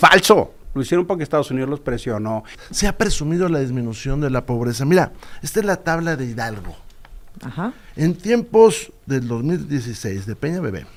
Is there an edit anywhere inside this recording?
no; 0 cuts

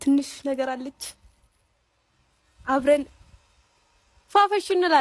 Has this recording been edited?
no; 0 cuts

